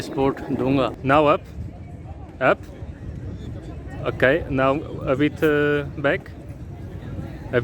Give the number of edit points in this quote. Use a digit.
1